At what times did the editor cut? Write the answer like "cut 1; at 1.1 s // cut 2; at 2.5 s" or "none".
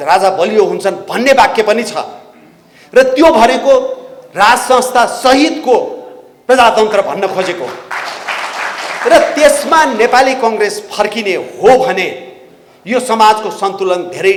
none